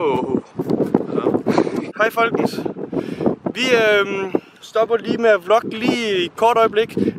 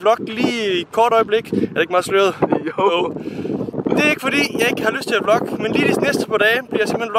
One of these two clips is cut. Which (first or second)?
first